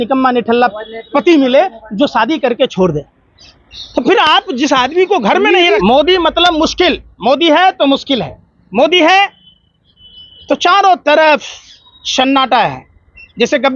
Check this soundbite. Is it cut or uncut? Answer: cut